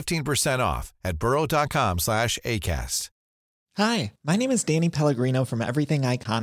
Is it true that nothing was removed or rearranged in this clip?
no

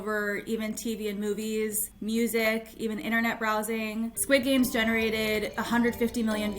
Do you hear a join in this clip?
yes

